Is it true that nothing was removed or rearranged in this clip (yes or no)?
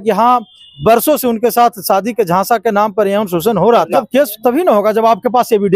no